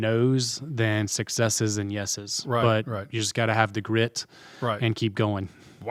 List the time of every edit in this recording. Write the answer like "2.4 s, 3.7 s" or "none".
none